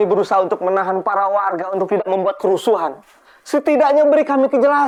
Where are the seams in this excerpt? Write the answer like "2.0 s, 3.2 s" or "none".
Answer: none